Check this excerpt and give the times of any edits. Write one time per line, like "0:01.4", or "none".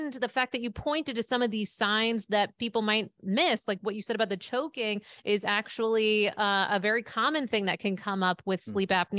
none